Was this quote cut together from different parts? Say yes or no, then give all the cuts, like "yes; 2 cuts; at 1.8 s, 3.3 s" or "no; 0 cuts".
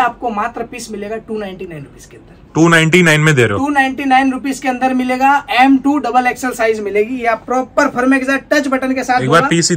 no; 0 cuts